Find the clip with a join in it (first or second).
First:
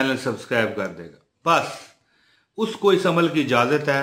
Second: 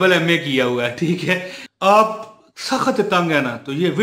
second